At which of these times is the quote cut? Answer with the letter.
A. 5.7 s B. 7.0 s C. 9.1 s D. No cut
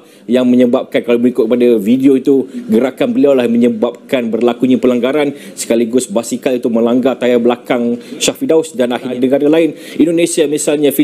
C